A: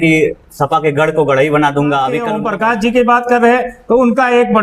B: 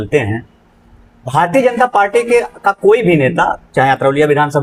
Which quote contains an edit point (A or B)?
A